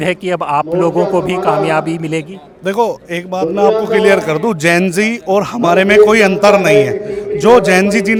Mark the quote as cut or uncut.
uncut